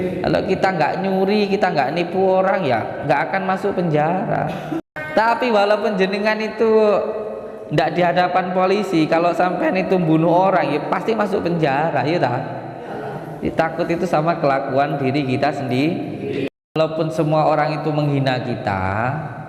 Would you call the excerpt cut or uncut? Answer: cut